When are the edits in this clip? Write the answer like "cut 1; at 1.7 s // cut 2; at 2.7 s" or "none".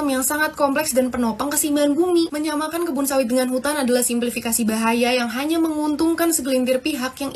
none